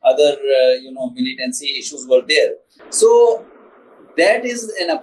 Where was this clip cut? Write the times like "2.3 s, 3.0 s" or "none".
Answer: none